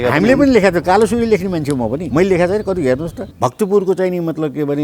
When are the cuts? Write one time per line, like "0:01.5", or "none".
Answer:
0:02.0
0:03.2